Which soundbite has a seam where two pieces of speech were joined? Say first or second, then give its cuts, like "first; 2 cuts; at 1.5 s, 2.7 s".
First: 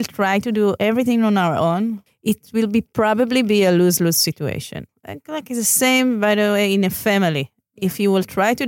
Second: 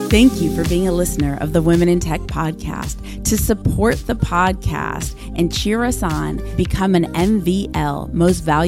first; 3 cuts; at 0.8 s, 2.1 s, 4.9 s